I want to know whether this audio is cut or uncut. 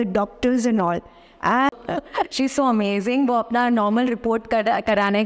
cut